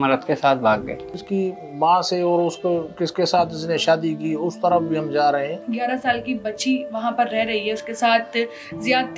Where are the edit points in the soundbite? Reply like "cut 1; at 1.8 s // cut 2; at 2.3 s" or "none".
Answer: cut 1; at 1.2 s // cut 2; at 5.6 s